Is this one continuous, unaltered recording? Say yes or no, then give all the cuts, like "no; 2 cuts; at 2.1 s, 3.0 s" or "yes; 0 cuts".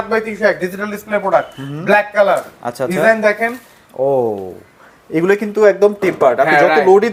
yes; 0 cuts